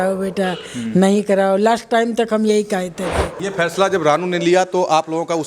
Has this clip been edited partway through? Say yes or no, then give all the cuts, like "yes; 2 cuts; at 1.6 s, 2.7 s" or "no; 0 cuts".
yes; 1 cut; at 3.4 s